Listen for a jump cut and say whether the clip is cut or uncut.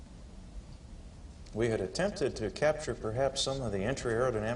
uncut